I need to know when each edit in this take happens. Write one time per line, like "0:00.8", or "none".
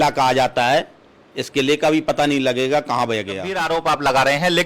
0:03.5